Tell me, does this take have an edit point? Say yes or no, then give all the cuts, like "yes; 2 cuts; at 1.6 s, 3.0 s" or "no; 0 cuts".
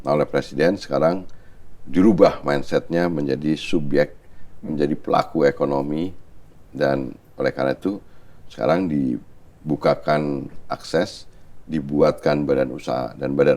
no; 0 cuts